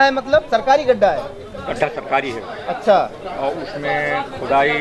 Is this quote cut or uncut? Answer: uncut